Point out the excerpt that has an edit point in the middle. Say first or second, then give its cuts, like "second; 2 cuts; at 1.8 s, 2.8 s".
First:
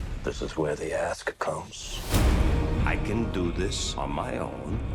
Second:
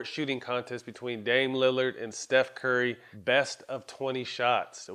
second; 1 cut; at 3.1 s